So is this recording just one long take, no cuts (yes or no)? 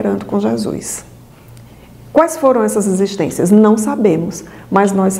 yes